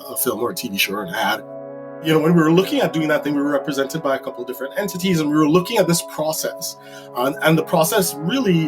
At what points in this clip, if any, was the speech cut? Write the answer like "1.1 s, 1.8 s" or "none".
2.0 s